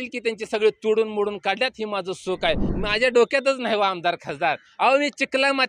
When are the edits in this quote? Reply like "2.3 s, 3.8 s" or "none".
2.7 s